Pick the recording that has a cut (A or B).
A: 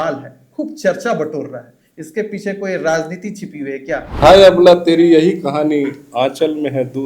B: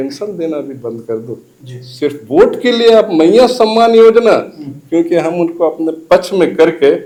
A